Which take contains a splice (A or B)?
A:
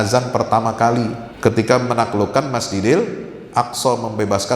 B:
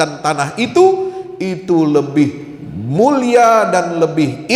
A